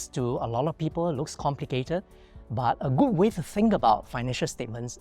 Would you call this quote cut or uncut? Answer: uncut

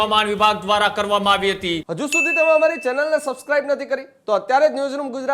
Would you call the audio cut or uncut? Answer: cut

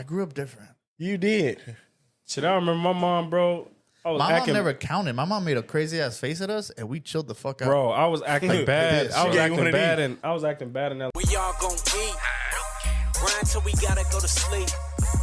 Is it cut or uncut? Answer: cut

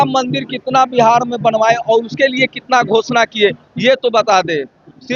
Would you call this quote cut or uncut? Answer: uncut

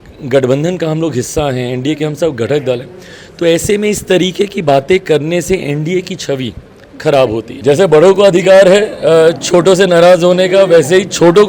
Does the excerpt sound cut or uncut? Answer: cut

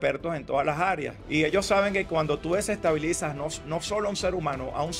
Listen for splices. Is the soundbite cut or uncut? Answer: cut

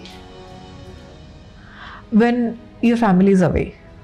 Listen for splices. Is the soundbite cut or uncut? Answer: uncut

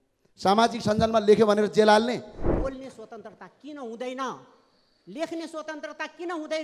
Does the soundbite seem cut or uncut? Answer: cut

